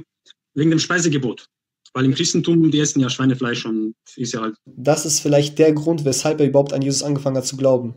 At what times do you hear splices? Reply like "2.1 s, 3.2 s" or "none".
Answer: 4.7 s